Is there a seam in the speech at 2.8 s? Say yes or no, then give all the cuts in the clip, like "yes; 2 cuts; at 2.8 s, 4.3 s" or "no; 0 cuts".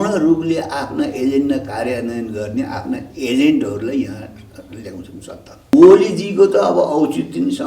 no; 1 cut; at 5.7 s